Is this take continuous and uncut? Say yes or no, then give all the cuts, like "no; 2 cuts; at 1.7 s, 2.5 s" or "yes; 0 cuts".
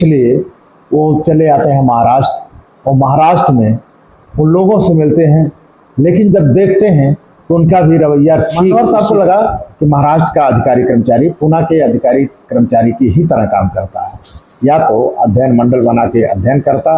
no; 1 cut; at 8.7 s